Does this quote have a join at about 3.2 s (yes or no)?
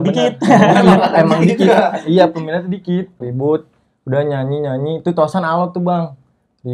yes